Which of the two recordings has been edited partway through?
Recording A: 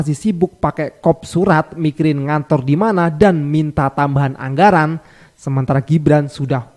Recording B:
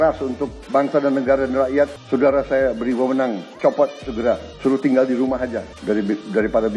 B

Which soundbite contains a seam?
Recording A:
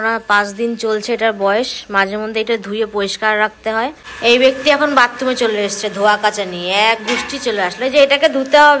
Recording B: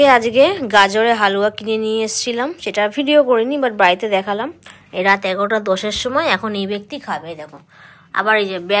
A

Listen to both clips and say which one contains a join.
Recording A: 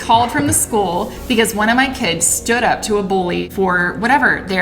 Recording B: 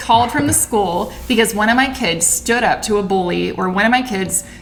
A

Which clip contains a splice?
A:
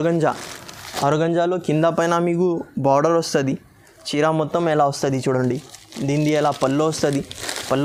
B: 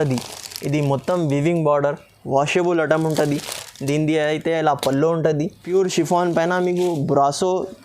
B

